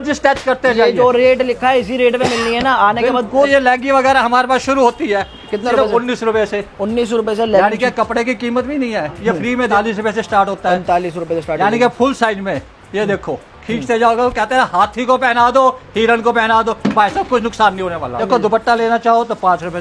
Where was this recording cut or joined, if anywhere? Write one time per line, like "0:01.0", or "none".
0:03.5
0:09.7
0:18.2